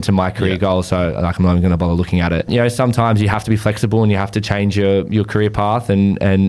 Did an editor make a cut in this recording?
yes; 1 cut; at 2.5 s

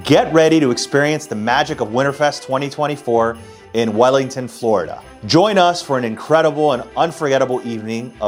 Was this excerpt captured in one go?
yes; 0 cuts

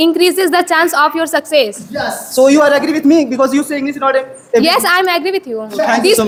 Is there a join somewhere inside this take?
no; 0 cuts

